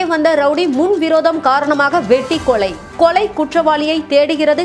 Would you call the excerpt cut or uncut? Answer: uncut